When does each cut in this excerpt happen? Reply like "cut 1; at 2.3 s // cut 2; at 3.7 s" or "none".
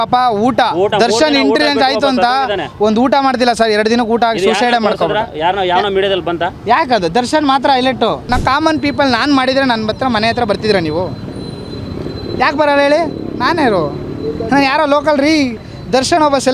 cut 1; at 8.3 s